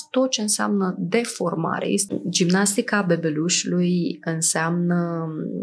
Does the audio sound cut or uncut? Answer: cut